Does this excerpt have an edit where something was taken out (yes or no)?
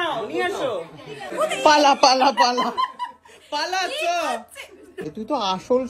yes